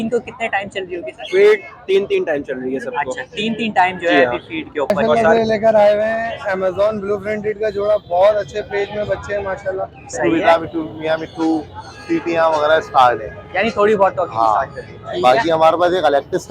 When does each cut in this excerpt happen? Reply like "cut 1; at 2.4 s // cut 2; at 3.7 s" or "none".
cut 1; at 5.1 s // cut 2; at 10.2 s